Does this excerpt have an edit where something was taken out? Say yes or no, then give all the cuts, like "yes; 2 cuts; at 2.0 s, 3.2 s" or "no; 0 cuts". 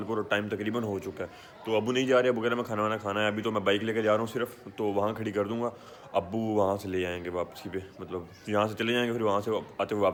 no; 0 cuts